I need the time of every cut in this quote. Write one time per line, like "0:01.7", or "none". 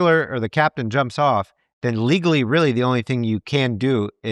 none